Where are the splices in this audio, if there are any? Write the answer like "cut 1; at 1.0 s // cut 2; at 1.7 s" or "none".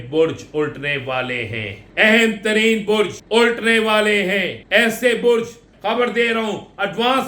cut 1; at 1.8 s // cut 2; at 3.2 s // cut 3; at 4.6 s // cut 4; at 5.7 s